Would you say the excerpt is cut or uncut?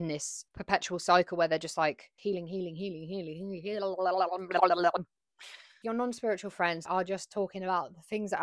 uncut